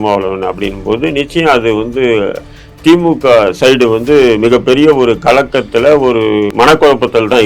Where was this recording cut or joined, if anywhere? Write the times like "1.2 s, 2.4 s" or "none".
6.5 s